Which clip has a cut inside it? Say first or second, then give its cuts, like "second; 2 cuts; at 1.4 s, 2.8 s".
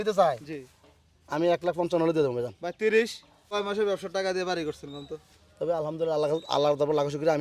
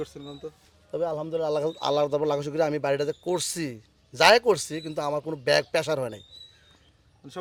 first; 1 cut; at 3.5 s